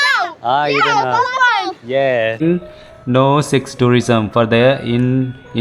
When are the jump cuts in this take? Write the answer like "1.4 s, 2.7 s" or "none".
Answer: 2.4 s